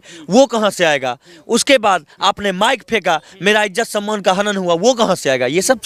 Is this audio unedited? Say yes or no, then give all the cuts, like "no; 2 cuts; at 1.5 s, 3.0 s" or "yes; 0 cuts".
yes; 0 cuts